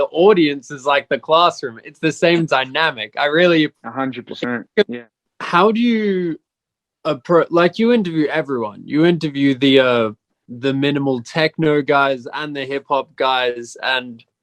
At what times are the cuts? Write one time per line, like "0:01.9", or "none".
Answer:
0:04.9